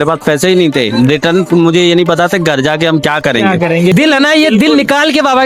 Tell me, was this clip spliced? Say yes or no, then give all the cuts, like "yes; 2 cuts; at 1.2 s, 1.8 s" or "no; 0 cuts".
yes; 1 cut; at 3.9 s